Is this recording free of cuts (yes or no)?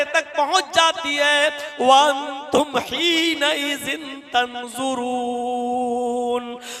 yes